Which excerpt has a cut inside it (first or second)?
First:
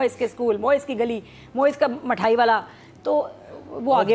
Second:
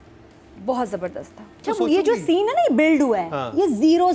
second